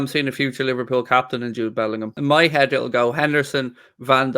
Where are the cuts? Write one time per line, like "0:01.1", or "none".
0:02.1

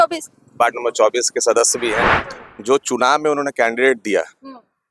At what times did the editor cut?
0:02.2

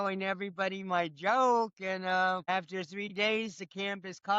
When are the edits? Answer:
0:02.4

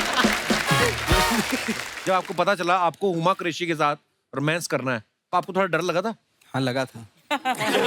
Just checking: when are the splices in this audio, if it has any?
0:01.9

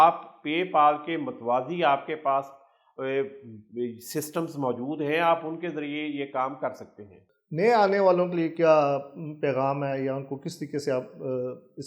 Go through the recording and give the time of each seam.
none

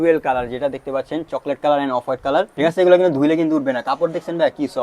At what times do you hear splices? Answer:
0:02.5

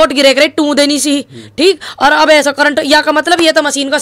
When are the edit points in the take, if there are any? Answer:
none

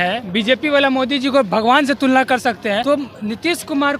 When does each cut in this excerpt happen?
0:02.8

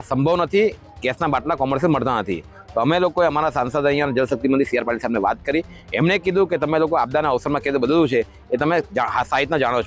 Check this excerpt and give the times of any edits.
none

